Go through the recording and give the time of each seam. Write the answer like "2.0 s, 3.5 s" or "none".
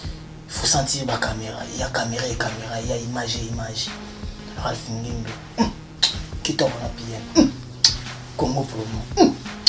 none